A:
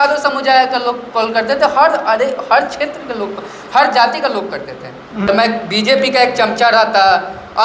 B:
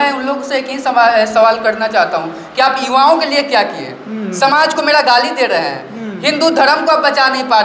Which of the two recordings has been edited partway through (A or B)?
A